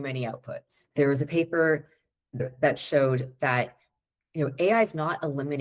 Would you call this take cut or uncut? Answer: cut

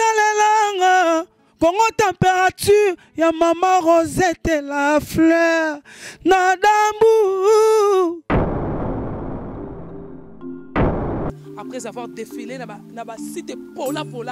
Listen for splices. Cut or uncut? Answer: uncut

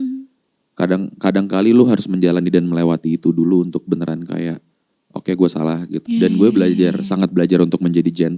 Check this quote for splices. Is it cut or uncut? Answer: cut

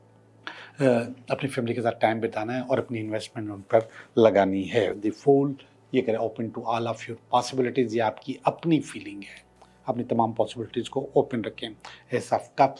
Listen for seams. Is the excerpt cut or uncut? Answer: uncut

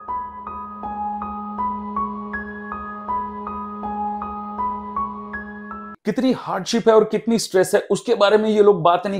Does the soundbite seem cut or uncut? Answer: cut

